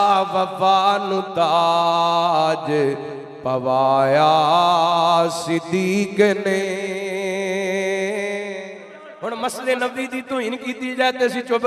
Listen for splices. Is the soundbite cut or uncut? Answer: cut